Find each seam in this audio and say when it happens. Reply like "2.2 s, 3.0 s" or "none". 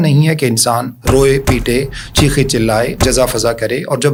none

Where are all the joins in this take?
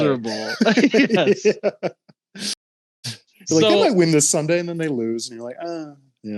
none

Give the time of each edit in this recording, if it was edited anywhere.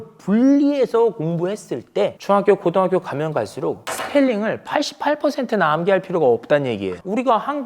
2.2 s, 3.9 s

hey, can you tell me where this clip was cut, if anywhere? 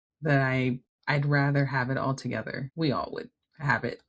0.9 s, 2.6 s

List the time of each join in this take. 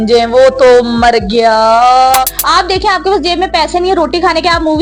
2.4 s

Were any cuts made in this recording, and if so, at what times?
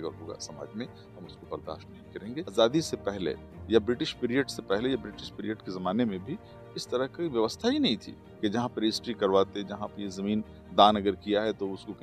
2.5 s

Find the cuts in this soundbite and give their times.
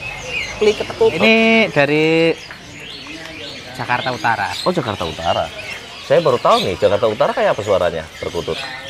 1.2 s

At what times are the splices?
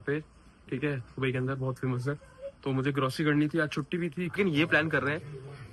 4.3 s

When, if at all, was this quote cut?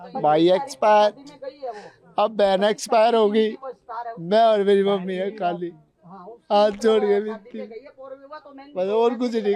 none

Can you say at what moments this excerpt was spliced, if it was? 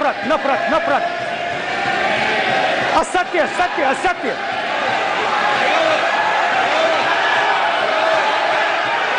none

